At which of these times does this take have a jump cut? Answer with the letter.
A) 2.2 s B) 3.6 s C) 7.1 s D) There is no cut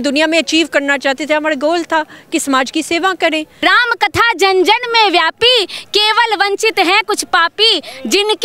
B